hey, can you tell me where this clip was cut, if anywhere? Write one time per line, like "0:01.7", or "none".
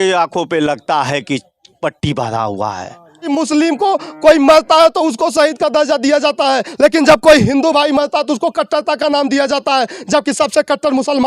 0:03.3

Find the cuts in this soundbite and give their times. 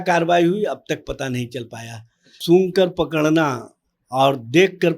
0:02.3

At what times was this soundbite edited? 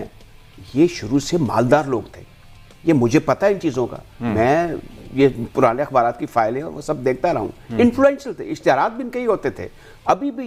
none

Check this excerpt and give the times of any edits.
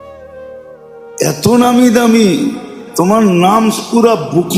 0:01.2

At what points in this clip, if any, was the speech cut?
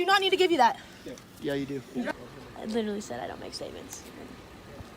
0:02.1

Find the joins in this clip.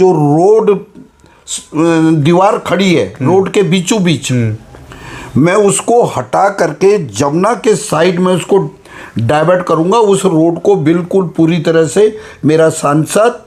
none

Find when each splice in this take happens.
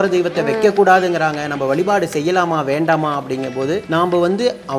0:03.8

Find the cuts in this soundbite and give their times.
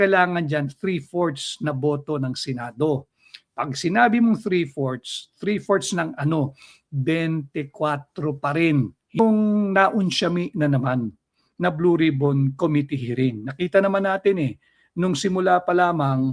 0:09.2

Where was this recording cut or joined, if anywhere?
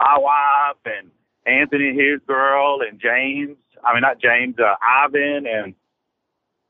none

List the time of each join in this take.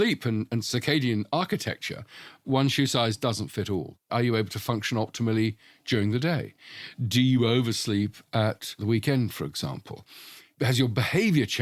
0:04.1
0:10.5

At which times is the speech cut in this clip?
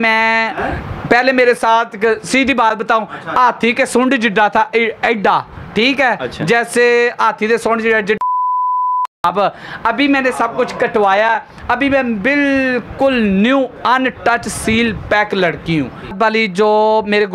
0:16.1

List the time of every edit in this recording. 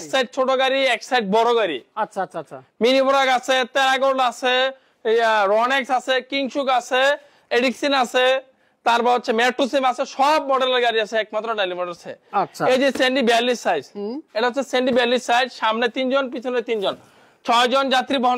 none

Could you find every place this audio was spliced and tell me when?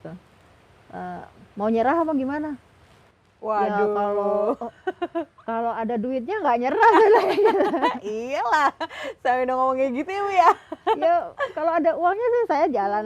none

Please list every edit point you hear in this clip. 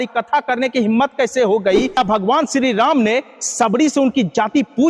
0:02.0

